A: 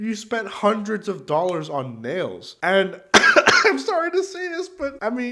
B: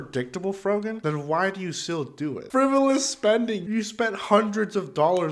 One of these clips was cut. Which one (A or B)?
B